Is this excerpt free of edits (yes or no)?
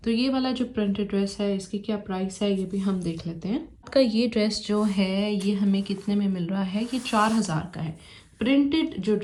yes